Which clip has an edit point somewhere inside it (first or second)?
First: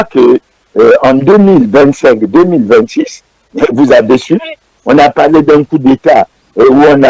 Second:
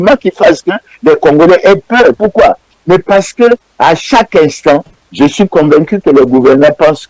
second